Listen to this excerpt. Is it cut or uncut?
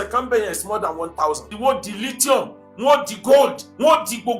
cut